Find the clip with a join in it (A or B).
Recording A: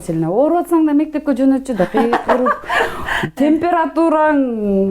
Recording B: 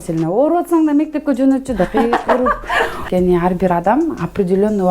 B